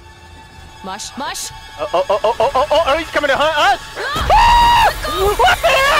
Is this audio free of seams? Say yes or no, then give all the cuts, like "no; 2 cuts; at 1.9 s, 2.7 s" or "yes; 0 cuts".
no; 1 cut; at 5.1 s